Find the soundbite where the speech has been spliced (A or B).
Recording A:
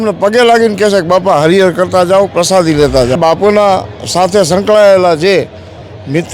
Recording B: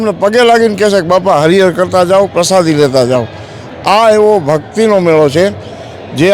A